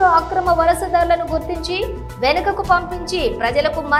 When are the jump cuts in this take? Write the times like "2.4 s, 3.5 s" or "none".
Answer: none